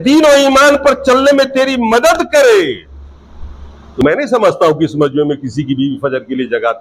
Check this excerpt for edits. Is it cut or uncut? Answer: cut